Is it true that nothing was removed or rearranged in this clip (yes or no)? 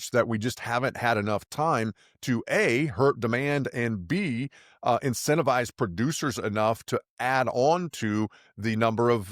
yes